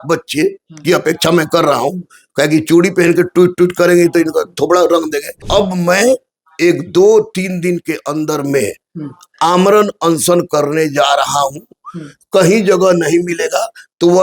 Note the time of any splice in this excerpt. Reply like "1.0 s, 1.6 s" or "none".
5.4 s

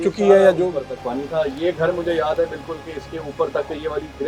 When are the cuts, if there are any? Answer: none

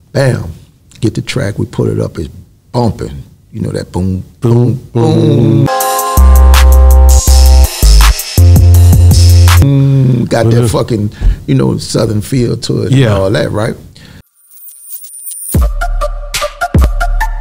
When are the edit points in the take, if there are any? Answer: 14.3 s

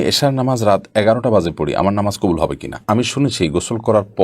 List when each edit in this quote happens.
2.8 s

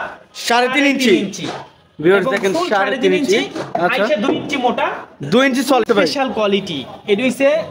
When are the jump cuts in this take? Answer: 5.8 s

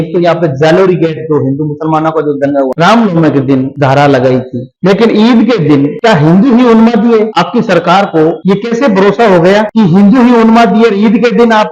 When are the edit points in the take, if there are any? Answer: 2.7 s, 3.7 s, 4.6 s, 5.9 s, 7.3 s, 8.4 s, 9.7 s

